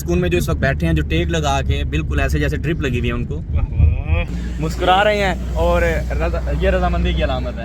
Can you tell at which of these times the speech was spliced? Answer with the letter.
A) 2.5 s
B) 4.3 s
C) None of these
B